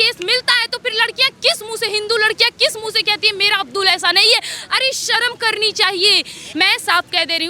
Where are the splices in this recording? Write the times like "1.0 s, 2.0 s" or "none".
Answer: 6.4 s